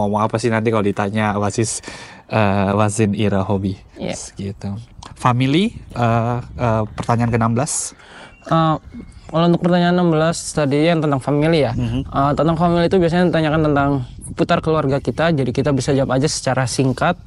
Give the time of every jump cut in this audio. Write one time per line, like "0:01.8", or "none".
none